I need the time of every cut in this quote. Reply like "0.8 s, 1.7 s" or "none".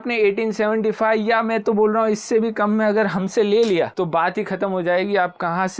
3.9 s